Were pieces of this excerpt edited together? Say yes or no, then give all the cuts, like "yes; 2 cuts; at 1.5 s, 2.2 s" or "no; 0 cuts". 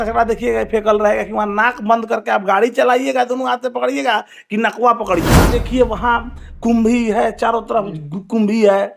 yes; 1 cut; at 5.4 s